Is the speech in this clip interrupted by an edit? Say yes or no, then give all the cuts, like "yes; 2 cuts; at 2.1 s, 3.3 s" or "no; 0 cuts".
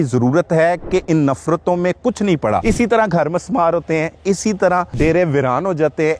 yes; 2 cuts; at 2.6 s, 4.9 s